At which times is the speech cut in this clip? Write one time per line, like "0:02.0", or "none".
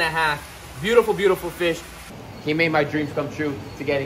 0:02.2